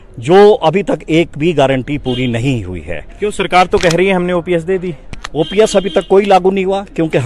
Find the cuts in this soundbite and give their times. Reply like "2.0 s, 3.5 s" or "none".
none